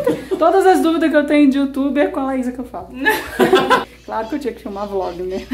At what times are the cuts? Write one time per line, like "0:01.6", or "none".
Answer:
0:03.9